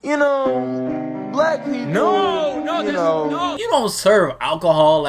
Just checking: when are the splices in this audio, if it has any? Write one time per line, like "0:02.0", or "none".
0:03.6